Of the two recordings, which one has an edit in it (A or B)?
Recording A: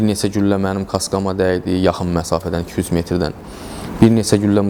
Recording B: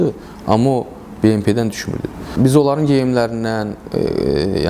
B